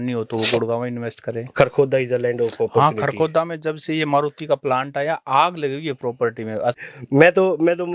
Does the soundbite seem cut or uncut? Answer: cut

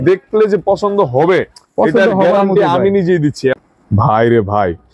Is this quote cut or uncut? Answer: cut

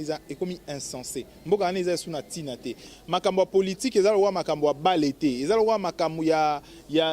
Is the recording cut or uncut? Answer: cut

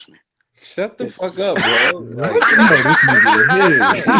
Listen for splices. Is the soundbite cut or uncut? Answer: uncut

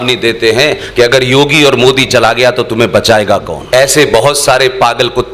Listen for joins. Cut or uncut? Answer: cut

